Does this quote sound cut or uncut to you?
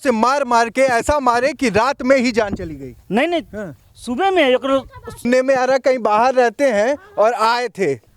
cut